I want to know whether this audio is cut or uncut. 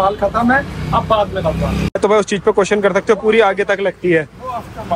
cut